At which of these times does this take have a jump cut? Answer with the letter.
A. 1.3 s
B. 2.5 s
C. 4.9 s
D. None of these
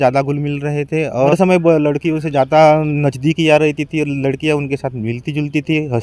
A